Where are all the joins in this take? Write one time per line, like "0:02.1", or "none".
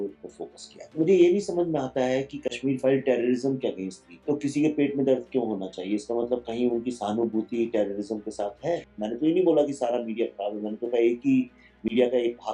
0:00.9
0:04.2
0:08.9